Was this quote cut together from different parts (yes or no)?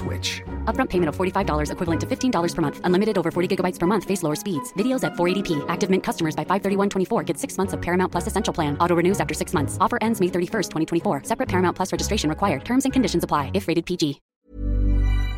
yes